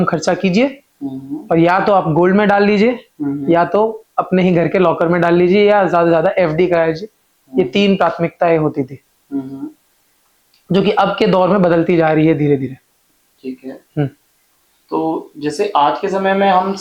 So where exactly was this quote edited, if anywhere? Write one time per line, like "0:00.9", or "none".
none